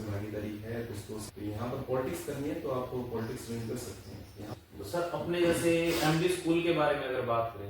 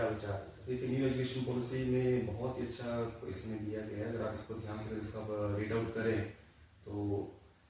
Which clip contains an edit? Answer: first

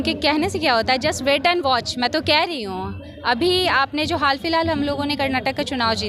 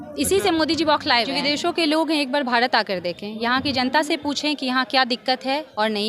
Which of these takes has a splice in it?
second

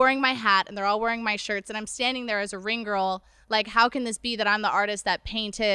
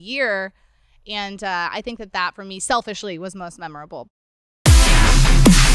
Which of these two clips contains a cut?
second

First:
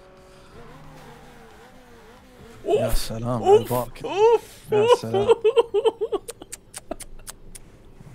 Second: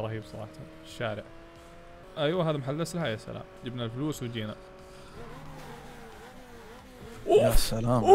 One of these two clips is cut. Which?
second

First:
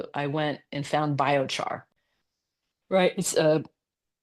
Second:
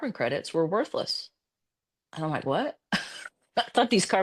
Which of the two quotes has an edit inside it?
first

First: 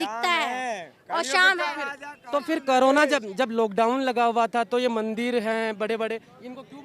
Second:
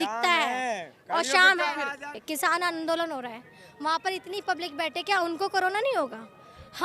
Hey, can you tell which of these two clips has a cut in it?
second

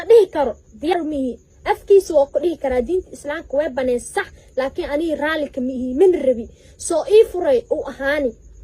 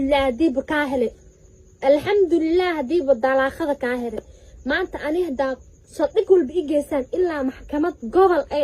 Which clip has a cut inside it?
first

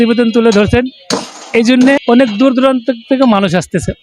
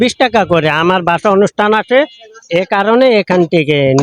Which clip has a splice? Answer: first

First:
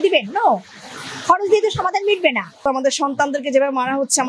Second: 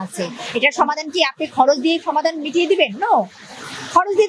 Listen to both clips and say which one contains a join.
first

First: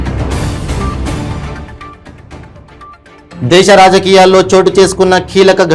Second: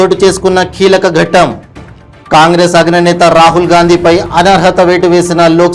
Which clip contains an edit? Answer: first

